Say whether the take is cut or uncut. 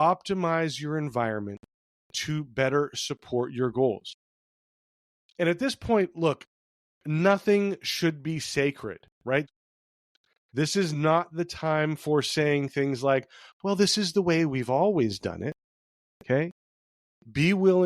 uncut